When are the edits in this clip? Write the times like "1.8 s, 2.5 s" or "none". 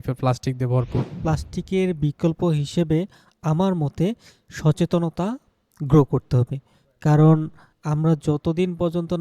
1.1 s